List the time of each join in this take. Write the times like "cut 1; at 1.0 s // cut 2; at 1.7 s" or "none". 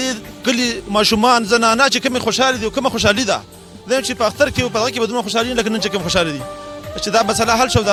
none